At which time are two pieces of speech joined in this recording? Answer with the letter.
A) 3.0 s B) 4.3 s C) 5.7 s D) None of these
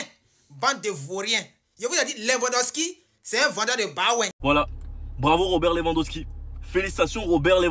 B